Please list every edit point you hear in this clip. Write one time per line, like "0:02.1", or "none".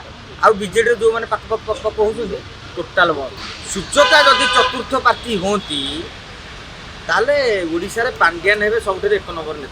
0:03.4